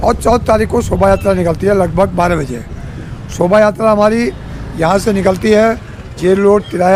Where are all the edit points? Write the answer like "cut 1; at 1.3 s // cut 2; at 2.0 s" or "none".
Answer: none